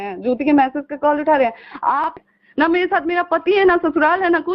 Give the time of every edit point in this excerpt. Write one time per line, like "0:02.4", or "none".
0:02.2